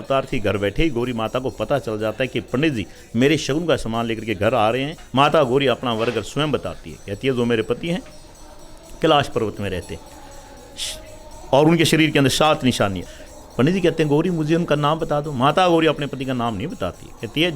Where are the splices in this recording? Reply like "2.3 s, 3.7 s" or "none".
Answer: 5.0 s, 13.0 s